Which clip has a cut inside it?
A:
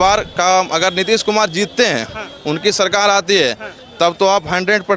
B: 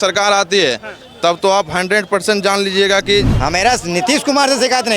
B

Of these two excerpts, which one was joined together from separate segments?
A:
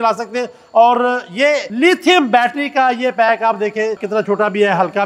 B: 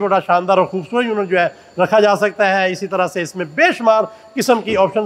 A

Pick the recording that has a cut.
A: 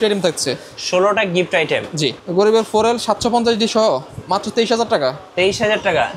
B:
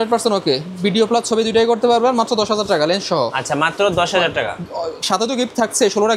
A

